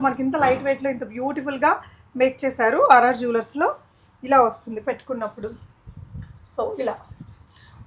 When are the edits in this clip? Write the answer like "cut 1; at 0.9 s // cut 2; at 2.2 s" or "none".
none